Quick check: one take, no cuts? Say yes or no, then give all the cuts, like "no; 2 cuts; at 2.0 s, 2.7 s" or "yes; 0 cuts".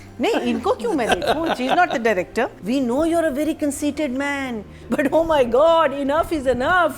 no; 2 cuts; at 2.6 s, 4.7 s